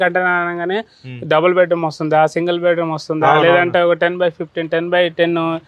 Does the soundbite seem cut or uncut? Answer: uncut